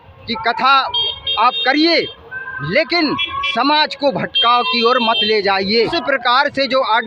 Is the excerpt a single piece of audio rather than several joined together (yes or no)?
no